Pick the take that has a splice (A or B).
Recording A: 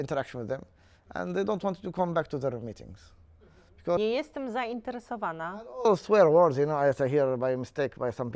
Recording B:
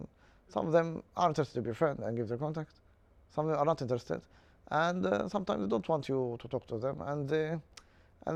A